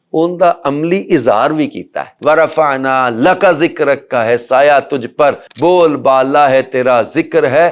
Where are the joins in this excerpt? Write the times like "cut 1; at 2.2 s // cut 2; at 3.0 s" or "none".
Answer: cut 1; at 2.1 s